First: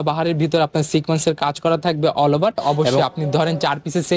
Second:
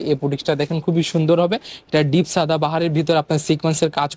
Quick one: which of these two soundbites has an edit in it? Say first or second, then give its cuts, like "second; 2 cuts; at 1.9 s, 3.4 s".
first; 1 cut; at 2.8 s